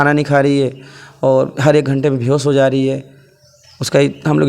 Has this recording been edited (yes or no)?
no